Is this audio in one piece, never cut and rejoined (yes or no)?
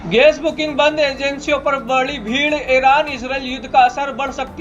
yes